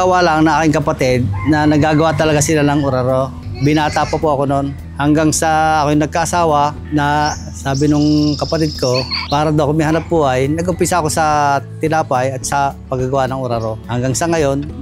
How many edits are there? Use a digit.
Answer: 0